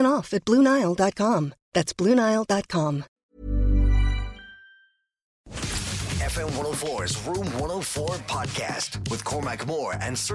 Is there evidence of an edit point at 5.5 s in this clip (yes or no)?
yes